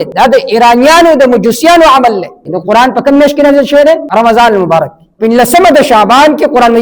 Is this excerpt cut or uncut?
cut